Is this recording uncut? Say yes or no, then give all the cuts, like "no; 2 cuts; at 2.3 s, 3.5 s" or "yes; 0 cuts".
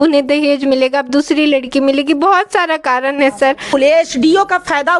no; 1 cut; at 3.7 s